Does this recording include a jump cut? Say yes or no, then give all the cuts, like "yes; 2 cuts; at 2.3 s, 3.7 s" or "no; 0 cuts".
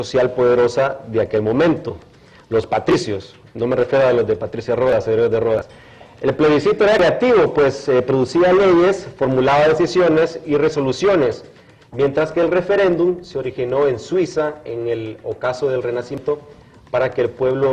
yes; 1 cut; at 13.5 s